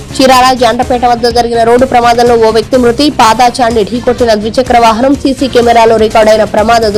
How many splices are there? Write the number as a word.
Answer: zero